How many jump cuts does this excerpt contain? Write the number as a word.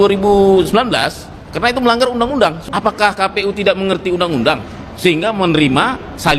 one